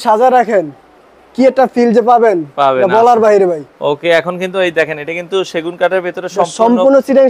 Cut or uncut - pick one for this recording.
uncut